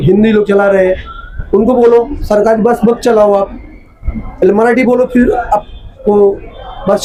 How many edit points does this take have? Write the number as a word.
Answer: zero